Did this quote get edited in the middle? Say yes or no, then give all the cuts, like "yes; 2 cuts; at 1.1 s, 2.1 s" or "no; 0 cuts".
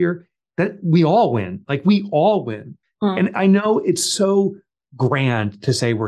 no; 0 cuts